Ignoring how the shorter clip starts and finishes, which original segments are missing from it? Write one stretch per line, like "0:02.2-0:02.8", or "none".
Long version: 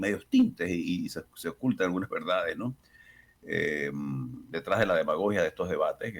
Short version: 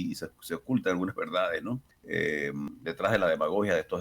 0:02.9-0:03.3
0:04.1-0:04.3